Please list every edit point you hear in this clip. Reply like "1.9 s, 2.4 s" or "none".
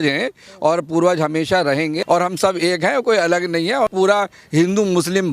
2.0 s, 3.9 s